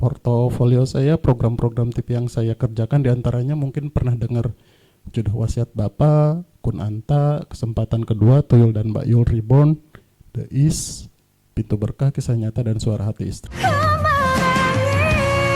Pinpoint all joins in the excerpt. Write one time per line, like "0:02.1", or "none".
0:13.4

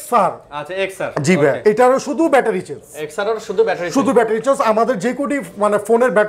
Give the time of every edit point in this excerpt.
0:01.4

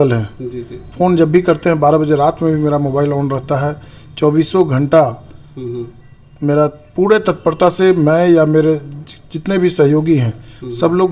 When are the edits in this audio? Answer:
none

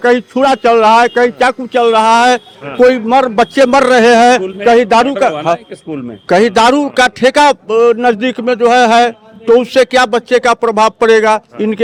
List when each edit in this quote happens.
none

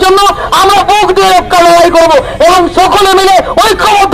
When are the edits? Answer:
none

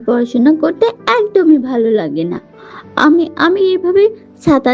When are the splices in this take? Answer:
none

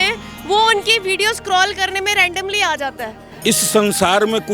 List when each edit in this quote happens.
0:03.2

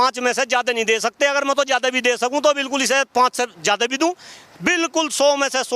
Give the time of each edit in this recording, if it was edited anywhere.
none

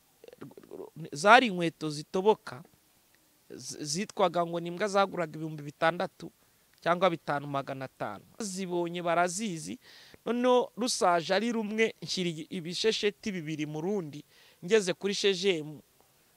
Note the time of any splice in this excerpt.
0:08.5

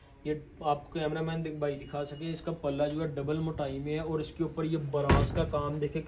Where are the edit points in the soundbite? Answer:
none

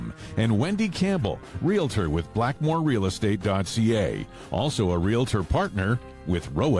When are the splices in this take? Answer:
none

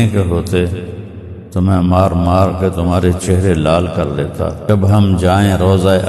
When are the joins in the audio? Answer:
0:04.6

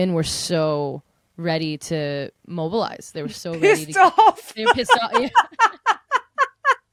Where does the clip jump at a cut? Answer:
none

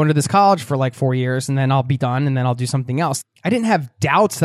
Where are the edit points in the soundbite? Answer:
0:03.2

